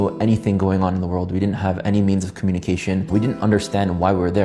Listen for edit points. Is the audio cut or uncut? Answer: cut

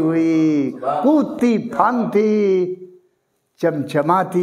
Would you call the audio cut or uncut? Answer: uncut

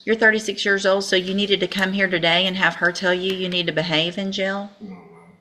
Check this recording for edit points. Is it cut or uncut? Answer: uncut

